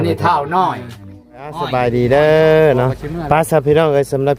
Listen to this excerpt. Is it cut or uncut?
cut